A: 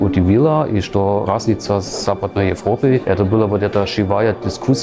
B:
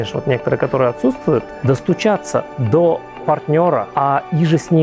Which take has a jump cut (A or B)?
B